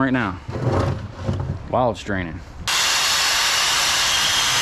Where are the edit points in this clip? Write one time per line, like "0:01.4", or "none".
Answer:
0:02.7